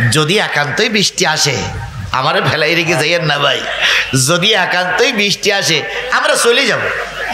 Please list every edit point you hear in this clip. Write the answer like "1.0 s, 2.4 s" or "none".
none